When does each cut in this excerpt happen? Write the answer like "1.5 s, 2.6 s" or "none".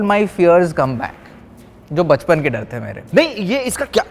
3.0 s

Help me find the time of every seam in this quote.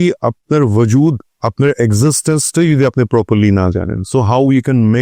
none

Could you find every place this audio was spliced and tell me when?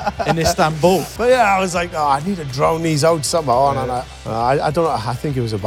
1.1 s, 4.2 s

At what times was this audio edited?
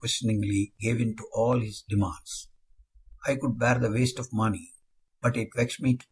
3.4 s

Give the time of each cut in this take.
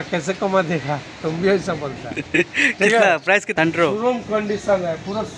3.5 s

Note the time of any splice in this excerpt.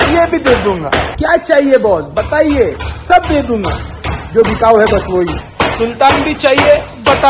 1.1 s, 5.5 s

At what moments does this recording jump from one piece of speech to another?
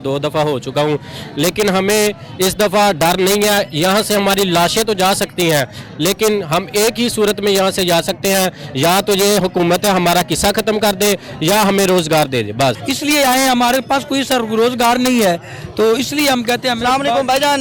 none

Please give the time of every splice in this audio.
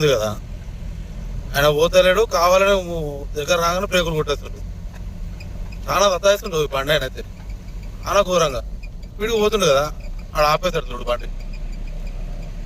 none

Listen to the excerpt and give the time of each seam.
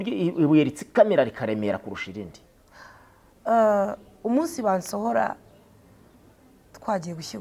none

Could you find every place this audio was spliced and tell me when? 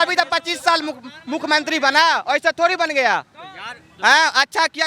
none

